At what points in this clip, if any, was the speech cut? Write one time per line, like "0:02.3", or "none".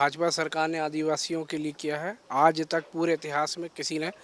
0:02.2